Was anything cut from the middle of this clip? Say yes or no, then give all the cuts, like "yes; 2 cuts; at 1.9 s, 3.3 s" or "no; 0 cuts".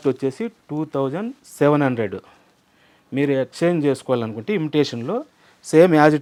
no; 0 cuts